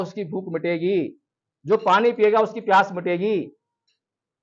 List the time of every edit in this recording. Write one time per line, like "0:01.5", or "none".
none